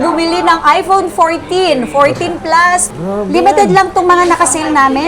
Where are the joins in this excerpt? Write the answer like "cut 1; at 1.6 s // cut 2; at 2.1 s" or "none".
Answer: cut 1; at 2.9 s